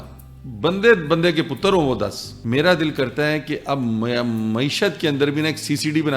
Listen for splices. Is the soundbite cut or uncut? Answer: cut